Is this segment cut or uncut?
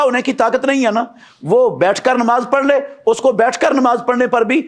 uncut